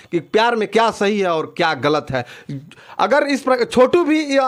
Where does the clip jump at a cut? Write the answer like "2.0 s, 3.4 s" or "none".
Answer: none